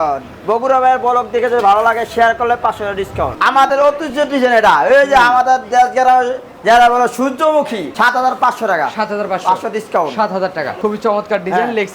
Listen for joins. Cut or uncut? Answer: cut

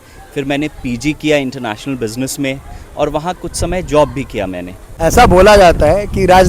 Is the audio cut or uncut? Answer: cut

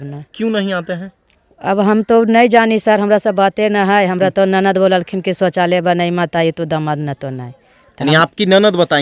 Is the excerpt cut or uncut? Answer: uncut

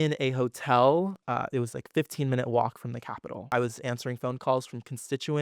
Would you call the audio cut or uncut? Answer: cut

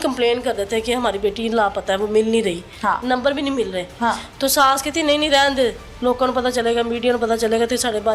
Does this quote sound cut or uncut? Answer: uncut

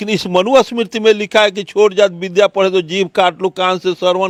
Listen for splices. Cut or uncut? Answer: uncut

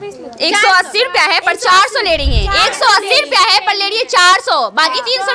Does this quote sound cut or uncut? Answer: uncut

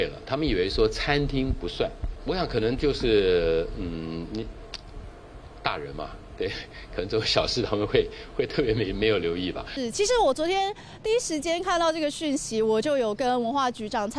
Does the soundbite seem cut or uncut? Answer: cut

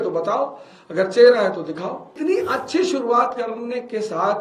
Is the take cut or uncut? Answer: cut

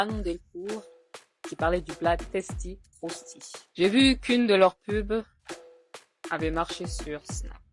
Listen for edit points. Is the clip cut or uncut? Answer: uncut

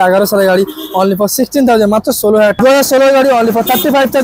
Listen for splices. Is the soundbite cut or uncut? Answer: cut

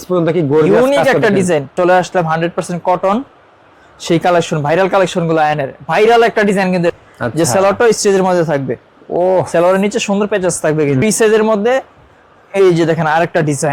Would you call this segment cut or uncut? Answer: cut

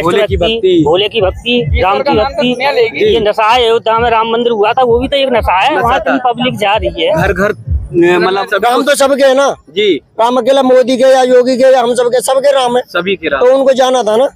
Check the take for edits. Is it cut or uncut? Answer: cut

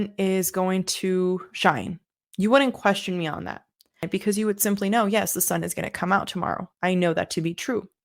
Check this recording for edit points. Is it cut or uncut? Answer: cut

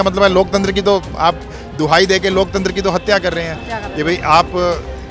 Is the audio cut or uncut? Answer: uncut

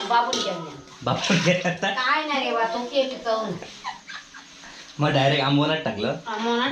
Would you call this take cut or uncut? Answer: uncut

